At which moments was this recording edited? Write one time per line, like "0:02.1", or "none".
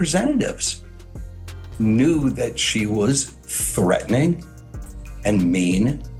none